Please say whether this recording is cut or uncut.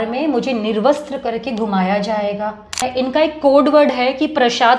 cut